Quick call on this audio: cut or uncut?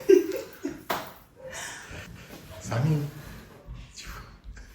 cut